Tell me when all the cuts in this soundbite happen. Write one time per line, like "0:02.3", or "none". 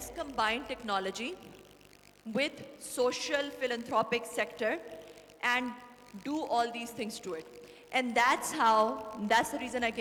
none